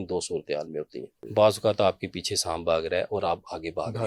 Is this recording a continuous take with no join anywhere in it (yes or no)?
no